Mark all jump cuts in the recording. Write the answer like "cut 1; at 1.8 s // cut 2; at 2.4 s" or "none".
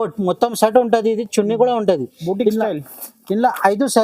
none